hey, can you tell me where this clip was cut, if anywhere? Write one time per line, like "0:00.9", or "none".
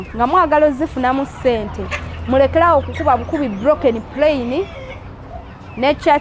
none